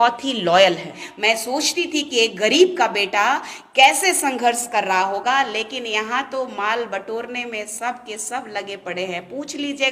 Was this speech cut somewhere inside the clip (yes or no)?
yes